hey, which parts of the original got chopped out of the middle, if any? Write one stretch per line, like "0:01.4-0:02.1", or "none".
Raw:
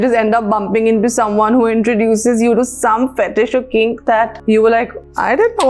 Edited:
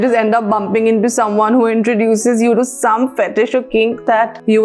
none